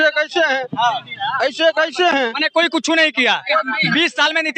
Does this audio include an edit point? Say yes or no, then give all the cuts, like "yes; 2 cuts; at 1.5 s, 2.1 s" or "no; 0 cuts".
no; 0 cuts